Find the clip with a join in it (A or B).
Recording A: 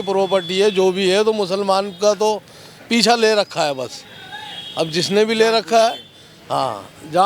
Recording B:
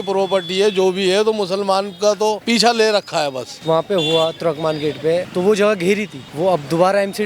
B